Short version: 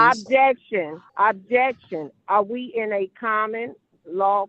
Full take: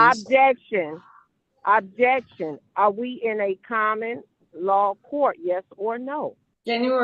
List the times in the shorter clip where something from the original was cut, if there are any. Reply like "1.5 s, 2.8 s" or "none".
1.0 s